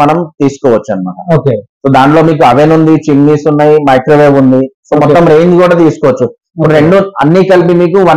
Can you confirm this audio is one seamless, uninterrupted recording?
yes; 0 cuts

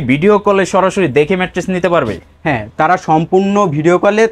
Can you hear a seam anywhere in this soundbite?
no; 0 cuts

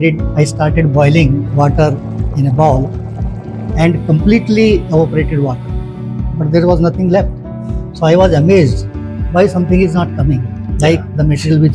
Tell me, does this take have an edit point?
no; 0 cuts

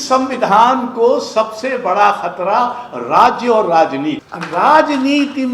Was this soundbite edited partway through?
yes; 1 cut; at 4.3 s

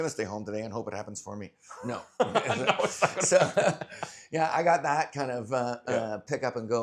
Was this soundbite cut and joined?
no; 0 cuts

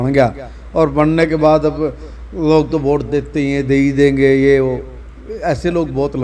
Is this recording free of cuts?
yes; 0 cuts

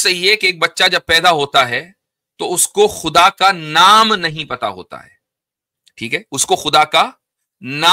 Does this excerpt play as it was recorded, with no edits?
yes; 0 cuts

